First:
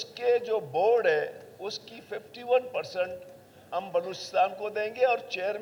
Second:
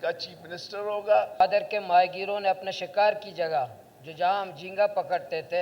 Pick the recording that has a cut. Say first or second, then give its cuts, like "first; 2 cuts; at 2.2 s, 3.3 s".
second; 1 cut; at 1.4 s